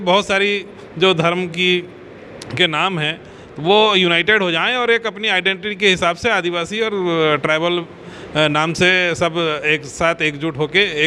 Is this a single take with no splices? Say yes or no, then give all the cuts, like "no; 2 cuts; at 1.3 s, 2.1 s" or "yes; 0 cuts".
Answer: yes; 0 cuts